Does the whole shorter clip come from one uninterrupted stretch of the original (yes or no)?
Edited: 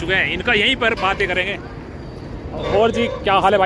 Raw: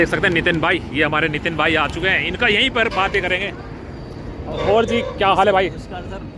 yes